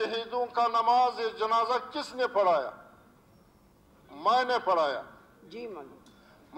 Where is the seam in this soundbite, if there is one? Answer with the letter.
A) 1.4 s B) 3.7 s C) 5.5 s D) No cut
D